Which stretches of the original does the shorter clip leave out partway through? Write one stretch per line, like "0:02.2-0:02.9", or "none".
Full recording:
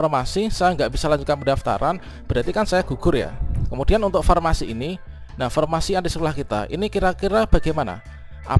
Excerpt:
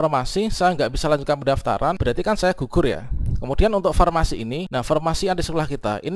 0:02.0-0:02.3
0:04.9-0:05.3